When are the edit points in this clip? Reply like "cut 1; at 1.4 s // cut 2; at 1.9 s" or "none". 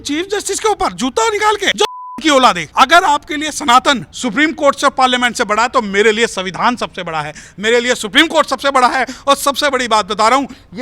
cut 1; at 1.7 s // cut 2; at 2.6 s // cut 3; at 4.1 s // cut 4; at 7.5 s